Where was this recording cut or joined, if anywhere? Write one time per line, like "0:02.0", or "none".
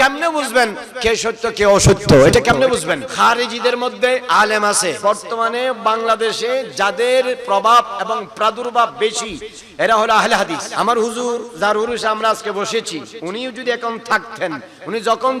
0:03.1
0:05.0
0:10.6